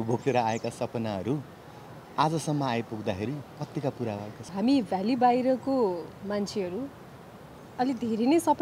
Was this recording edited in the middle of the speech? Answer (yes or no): yes